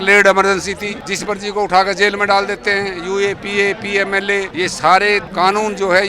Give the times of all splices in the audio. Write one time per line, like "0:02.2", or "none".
0:00.9
0:04.5
0:05.3